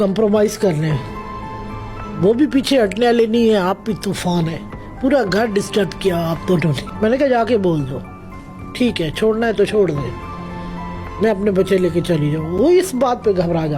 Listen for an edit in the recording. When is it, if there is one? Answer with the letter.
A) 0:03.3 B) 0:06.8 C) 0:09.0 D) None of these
B